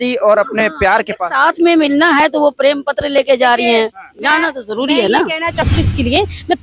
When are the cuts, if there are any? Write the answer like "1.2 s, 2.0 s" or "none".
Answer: 5.6 s